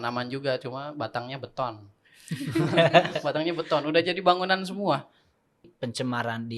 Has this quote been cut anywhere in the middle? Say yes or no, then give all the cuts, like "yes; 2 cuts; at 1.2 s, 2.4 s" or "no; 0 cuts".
yes; 1 cut; at 5.6 s